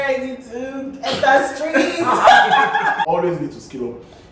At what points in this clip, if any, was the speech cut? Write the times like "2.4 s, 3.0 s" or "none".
3.1 s